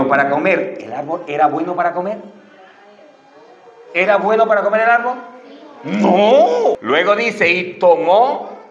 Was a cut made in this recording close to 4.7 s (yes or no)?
no